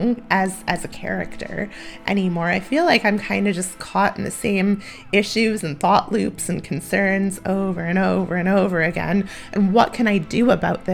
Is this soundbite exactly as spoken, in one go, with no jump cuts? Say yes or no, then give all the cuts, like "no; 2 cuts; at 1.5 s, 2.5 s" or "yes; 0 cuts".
yes; 0 cuts